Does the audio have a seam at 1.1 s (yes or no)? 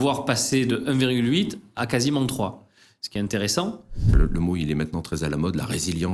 no